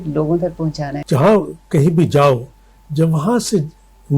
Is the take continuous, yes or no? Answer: no